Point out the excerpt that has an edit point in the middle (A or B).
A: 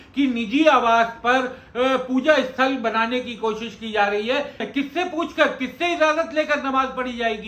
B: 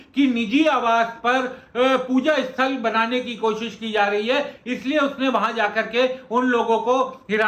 A